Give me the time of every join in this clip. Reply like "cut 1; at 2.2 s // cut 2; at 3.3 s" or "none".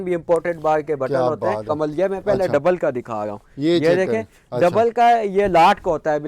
cut 1; at 1.7 s